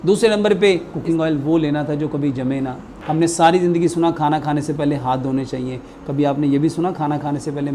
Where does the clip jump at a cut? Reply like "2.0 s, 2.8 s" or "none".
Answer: 0.9 s, 2.9 s